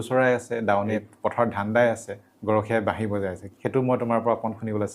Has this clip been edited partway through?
yes; 2 cuts; at 2.3 s, 3.5 s

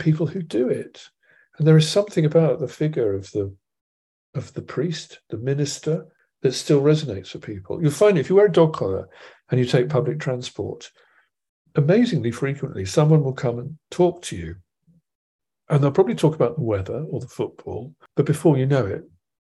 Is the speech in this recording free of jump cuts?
no; 2 cuts; at 6.2 s, 18.0 s

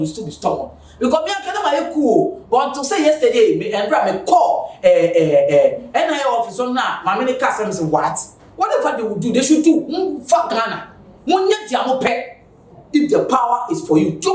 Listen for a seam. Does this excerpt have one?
no; 0 cuts

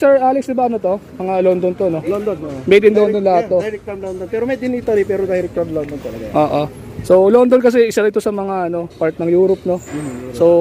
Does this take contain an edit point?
no; 0 cuts

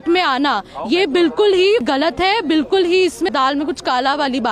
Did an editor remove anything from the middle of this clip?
yes; 2 cuts; at 1.9 s, 3.3 s

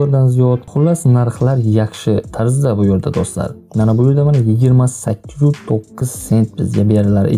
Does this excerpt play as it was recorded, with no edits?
yes; 0 cuts

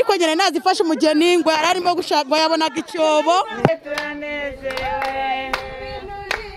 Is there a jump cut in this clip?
no; 0 cuts

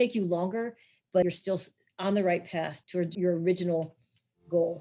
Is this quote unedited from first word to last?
no; 2 cuts; at 1.2 s, 3.1 s

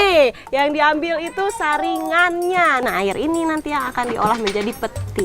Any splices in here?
yes; 1 cut; at 2.8 s

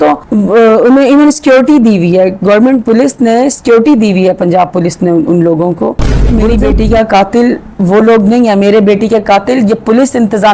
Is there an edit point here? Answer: yes; 1 cut; at 6.3 s

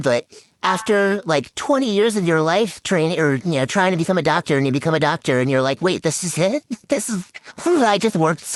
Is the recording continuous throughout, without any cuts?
yes; 0 cuts

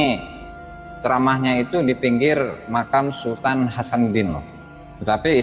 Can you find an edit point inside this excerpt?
no; 0 cuts

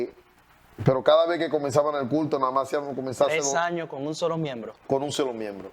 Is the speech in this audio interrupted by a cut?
no; 0 cuts

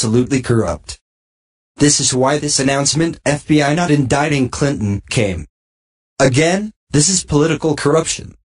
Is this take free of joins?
no; 1 cut; at 5.5 s

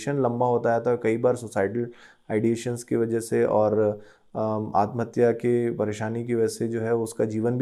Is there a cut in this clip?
no; 0 cuts

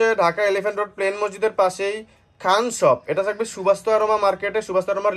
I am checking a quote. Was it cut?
no; 0 cuts

